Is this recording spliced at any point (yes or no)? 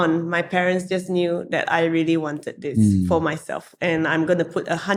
no